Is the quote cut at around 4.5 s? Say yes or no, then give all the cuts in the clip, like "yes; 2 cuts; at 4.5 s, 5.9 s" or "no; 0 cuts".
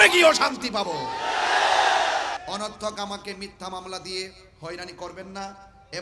no; 1 cut; at 2.4 s